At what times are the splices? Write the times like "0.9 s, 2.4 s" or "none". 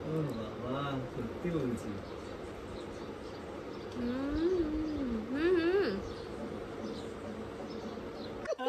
none